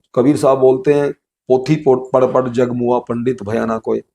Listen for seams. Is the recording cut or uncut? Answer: uncut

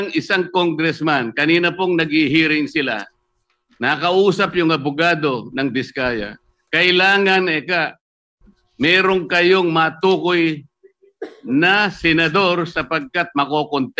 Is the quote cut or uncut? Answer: uncut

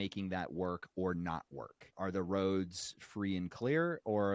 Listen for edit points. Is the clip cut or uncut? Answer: cut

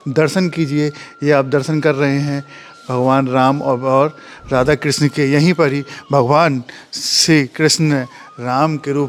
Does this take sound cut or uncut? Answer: uncut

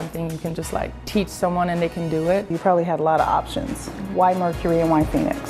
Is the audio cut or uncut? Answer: cut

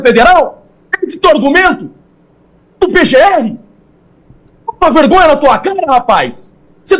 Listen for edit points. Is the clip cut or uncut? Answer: uncut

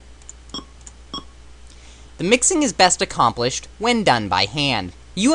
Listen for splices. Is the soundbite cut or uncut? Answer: cut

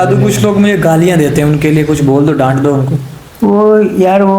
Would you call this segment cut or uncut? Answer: uncut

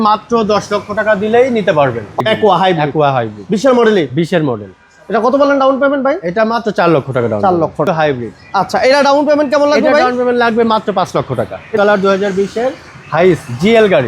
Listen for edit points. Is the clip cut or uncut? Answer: cut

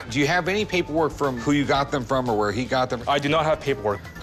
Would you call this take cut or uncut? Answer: uncut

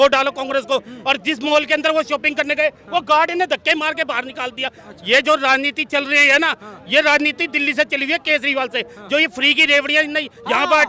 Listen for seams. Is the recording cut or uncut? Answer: uncut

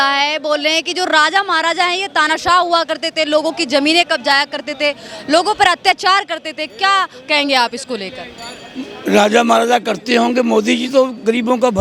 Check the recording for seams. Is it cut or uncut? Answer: uncut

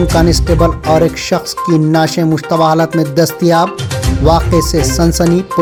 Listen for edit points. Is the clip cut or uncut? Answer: uncut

